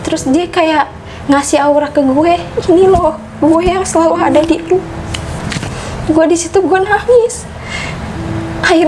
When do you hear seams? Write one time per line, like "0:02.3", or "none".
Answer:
0:05.4